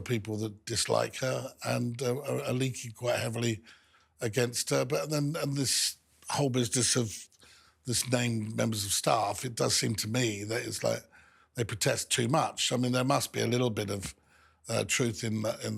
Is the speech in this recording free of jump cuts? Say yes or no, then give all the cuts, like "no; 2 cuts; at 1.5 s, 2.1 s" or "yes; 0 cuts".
yes; 0 cuts